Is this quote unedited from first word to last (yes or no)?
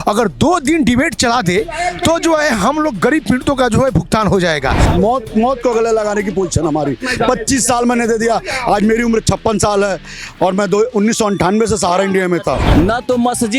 no